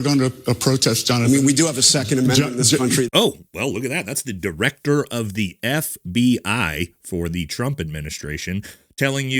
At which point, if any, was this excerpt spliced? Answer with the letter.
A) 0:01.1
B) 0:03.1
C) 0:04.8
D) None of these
B